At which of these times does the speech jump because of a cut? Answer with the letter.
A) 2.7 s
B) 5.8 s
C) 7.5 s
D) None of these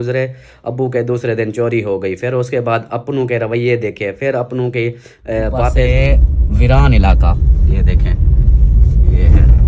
B